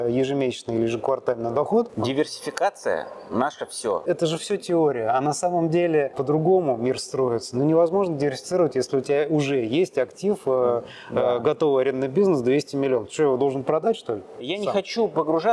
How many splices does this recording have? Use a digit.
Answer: 4